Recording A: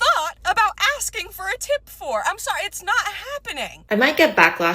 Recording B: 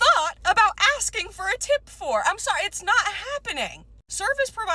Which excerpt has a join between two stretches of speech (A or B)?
A